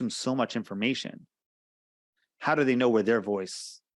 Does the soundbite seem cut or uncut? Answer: uncut